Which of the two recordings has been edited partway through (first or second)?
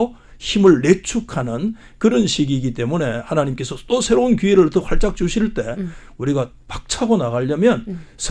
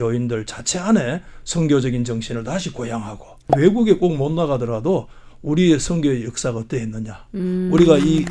second